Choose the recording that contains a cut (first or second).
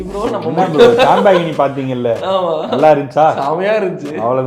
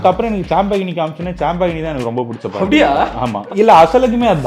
second